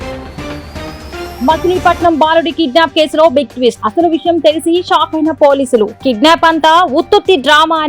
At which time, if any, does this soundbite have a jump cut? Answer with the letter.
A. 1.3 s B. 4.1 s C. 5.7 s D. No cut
A